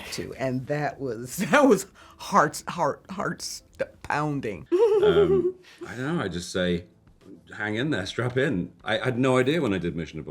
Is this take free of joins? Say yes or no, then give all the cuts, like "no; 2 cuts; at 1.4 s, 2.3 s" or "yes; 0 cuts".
no; 1 cut; at 4.6 s